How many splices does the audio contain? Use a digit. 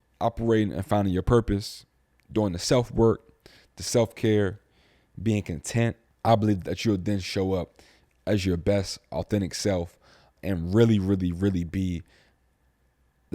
2